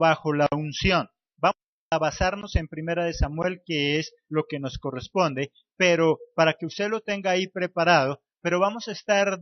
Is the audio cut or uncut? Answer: uncut